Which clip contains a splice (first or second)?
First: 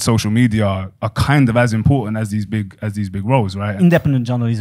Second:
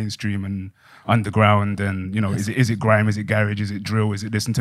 first